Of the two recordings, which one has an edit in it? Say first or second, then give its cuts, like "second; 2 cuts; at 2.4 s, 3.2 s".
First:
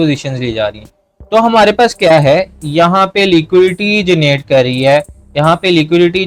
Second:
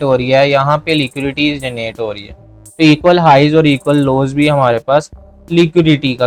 second; 1 cut; at 2.6 s